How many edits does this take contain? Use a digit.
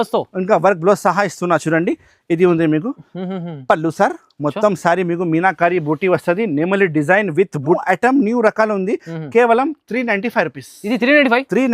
1